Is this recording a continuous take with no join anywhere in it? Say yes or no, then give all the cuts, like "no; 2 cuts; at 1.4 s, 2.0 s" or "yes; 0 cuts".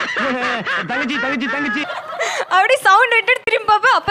yes; 0 cuts